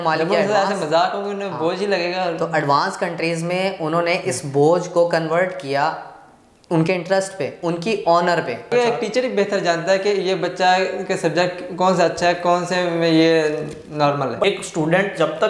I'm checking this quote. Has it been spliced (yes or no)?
yes